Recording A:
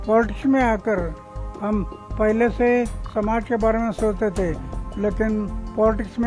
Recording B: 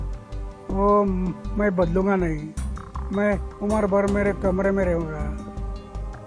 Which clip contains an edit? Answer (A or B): B